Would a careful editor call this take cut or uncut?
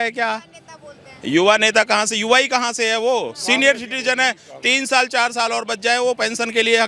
uncut